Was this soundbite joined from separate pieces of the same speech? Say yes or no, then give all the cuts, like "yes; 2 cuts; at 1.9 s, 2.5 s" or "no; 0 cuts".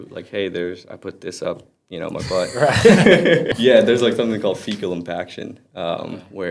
yes; 1 cut; at 3.5 s